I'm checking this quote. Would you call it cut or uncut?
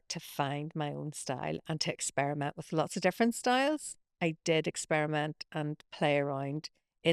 uncut